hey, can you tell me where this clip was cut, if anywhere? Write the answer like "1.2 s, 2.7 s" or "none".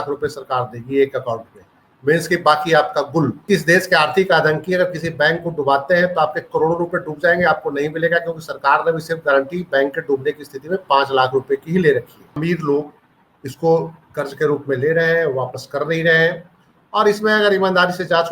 3.4 s, 12.3 s